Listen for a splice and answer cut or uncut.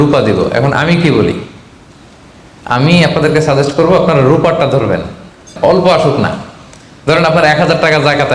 cut